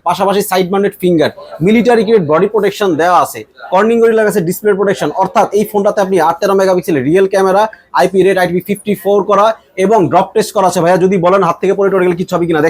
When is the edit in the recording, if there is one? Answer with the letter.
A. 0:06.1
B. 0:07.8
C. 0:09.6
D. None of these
D